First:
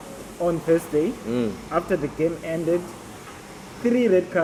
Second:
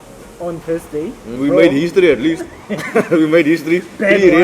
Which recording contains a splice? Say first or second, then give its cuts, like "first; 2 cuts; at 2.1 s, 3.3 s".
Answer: second; 1 cut; at 1.4 s